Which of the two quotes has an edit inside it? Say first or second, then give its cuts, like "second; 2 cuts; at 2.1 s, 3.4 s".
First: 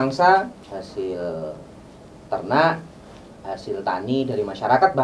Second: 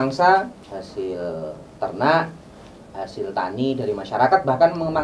second; 1 cut; at 1.6 s